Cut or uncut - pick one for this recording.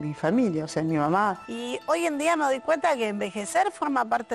cut